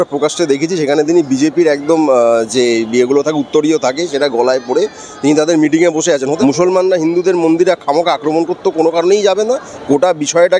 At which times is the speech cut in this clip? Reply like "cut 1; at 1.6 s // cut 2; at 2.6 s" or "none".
cut 1; at 6.3 s // cut 2; at 9.7 s